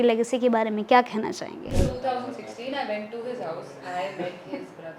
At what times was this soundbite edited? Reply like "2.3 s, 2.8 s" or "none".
1.7 s